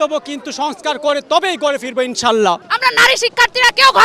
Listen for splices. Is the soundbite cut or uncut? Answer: cut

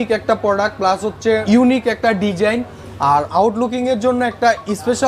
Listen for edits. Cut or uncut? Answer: cut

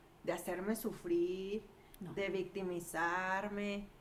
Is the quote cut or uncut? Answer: uncut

